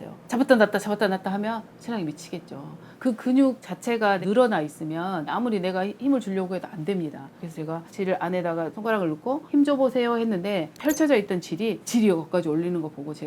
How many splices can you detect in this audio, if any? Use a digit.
2